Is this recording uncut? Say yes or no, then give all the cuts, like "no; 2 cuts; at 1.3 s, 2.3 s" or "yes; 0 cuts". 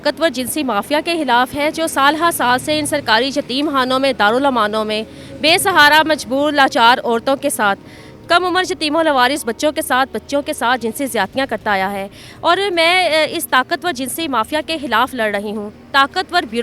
yes; 0 cuts